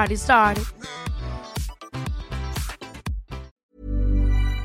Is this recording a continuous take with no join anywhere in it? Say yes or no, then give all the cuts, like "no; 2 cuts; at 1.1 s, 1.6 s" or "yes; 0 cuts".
no; 1 cut; at 3.5 s